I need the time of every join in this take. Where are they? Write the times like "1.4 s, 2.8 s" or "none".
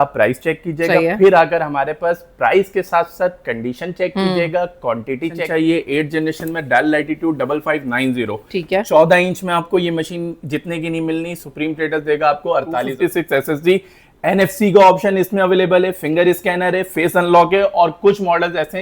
5.4 s, 12.9 s